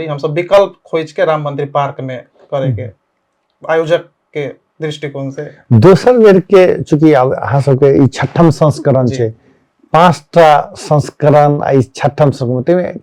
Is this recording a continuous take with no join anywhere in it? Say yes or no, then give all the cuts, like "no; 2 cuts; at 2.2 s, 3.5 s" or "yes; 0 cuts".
yes; 0 cuts